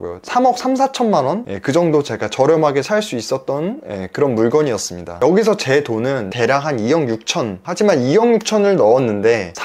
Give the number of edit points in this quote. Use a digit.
3